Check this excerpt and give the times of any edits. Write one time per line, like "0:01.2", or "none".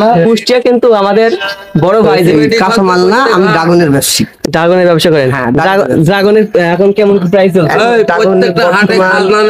0:02.3